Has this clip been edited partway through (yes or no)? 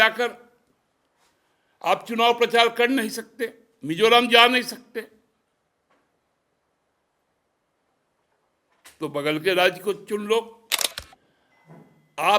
yes